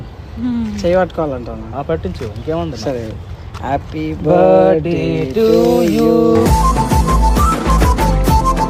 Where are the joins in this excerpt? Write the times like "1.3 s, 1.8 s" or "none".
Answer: none

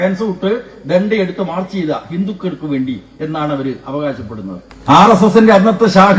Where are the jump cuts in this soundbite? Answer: 4.7 s

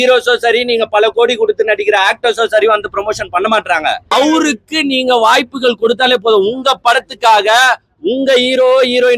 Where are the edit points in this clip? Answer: 4.1 s

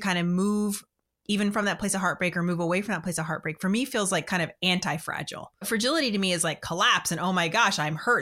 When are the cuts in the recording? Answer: 5.7 s

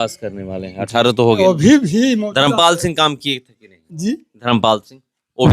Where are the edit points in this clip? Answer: 1.4 s

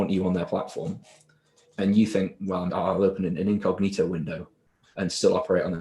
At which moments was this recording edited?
2.7 s

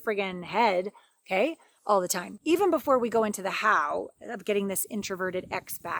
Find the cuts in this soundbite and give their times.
2.2 s

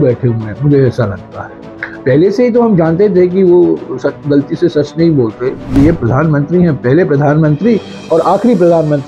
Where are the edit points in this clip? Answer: 5.7 s

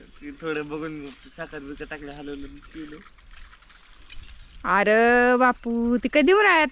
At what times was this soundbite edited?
none

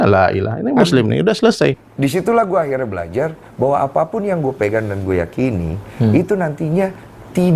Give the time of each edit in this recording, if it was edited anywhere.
1.7 s

